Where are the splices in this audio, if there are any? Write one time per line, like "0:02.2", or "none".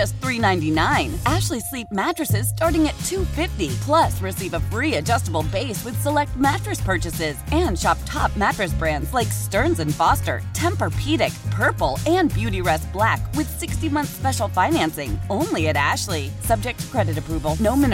none